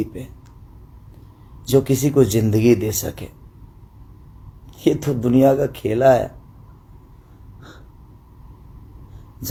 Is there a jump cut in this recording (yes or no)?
no